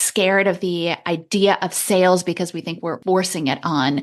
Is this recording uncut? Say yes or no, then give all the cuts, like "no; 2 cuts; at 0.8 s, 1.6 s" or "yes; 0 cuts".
no; 1 cut; at 3.0 s